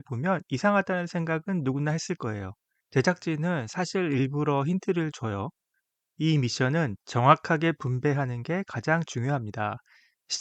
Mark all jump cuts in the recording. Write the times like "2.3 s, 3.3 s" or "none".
none